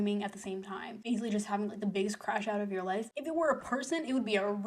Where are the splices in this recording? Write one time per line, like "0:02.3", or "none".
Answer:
0:03.1